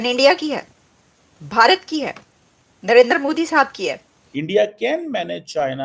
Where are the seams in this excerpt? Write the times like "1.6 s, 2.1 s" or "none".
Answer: 4.4 s